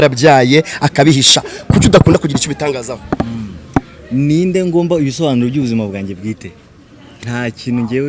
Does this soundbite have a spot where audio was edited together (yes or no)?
no